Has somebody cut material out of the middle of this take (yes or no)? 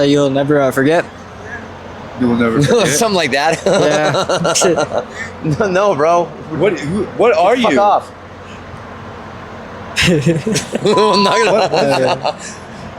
yes